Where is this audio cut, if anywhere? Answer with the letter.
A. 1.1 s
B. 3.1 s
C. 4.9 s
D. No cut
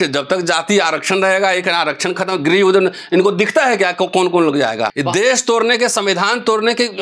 C